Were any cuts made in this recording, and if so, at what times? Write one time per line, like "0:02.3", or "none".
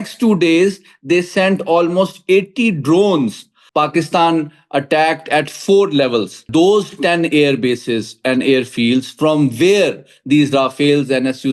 0:03.5
0:06.5